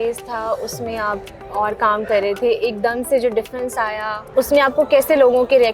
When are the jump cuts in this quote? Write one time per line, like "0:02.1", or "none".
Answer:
0:04.2